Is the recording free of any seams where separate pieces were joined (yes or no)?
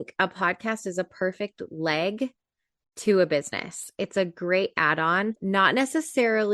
no